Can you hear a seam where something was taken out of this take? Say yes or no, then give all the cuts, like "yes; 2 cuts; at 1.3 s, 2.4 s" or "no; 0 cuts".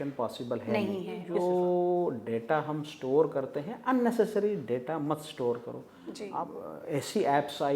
yes; 2 cuts; at 1.2 s, 6.2 s